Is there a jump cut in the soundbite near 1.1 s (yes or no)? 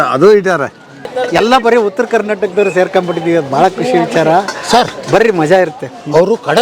yes